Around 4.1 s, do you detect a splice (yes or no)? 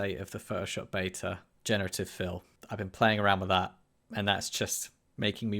no